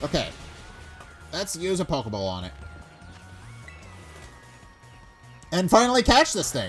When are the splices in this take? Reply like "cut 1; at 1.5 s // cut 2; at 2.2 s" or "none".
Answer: cut 1; at 2.5 s // cut 2; at 5.5 s